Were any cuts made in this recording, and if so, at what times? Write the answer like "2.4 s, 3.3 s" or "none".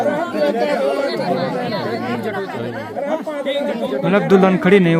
none

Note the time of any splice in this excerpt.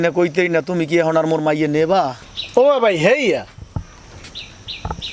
2.3 s

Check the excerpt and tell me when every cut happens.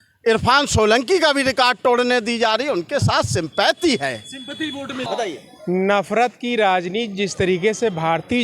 5.1 s

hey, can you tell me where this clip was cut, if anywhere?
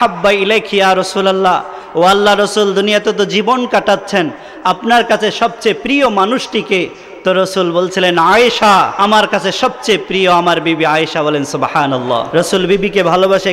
8.9 s, 12.3 s

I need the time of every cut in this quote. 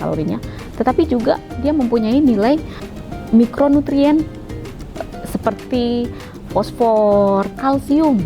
2.9 s, 5.0 s

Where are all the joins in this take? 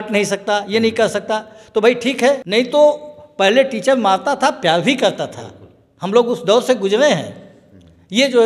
2.4 s

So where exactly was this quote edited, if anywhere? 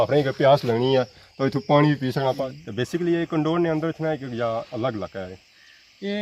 2.4 s

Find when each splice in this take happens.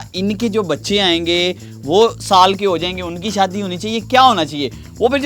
none

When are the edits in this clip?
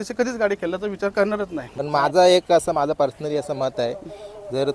1.7 s

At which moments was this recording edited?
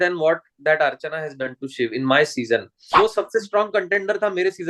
2.8 s

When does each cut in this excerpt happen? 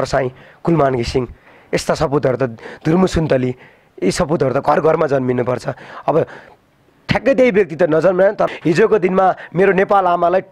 8.5 s

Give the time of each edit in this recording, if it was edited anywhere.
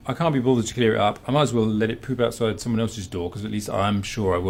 none

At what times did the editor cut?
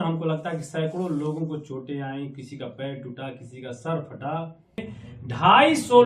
4.9 s

